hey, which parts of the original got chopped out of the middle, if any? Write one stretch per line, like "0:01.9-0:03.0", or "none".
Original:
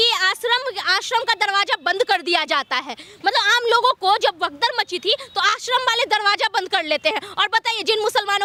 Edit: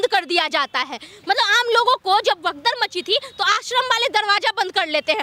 none

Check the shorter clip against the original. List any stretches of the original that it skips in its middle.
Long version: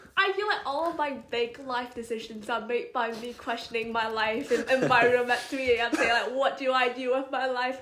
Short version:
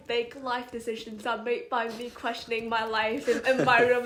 none

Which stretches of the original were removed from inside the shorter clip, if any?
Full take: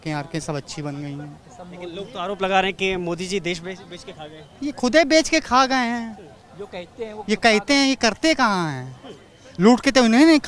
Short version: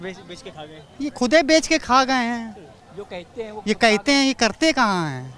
none

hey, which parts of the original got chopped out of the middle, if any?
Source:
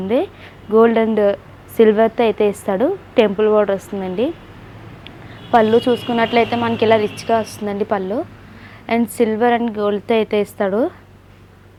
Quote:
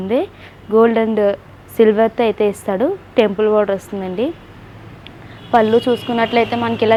none

